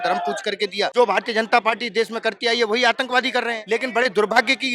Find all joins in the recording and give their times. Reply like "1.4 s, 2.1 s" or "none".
0.9 s, 3.6 s